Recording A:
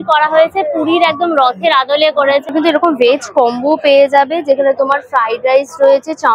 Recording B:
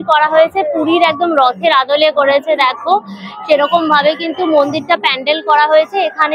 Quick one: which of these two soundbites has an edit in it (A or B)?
A